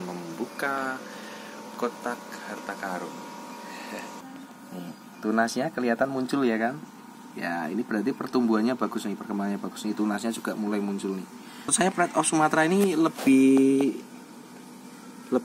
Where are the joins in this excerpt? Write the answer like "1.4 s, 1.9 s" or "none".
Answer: 4.2 s, 11.7 s